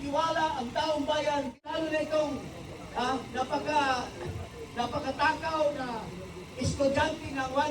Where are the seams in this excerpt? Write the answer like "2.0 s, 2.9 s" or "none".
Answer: 1.6 s

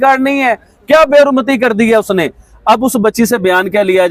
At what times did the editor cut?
none

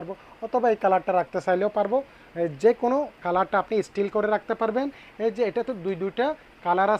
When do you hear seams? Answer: none

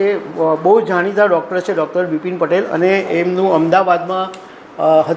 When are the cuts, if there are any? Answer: none

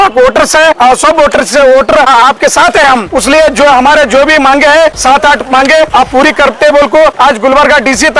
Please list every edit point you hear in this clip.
0.8 s, 2.1 s, 3.1 s, 5.0 s, 5.9 s, 7.2 s

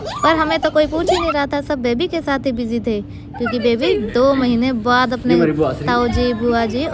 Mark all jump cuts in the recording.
none

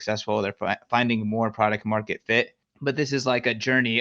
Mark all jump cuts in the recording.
2.6 s

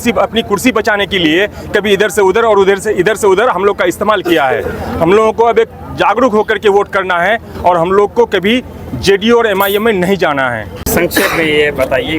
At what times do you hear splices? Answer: none

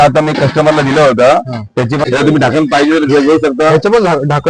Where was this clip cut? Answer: 2.0 s

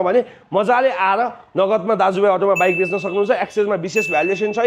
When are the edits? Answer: none

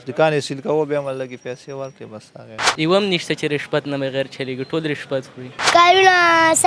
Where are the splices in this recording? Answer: 2.8 s, 5.7 s

